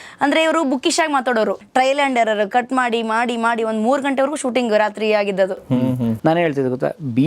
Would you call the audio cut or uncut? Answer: cut